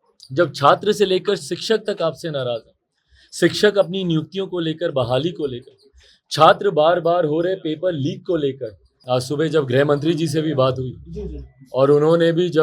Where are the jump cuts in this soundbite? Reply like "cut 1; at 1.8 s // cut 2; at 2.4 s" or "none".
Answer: cut 1; at 8.9 s